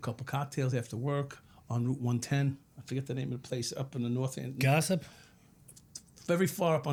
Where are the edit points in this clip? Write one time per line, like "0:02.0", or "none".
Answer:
none